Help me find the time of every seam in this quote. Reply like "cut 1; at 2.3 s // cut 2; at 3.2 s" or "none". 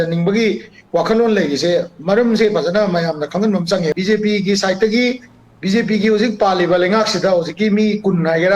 cut 1; at 3.9 s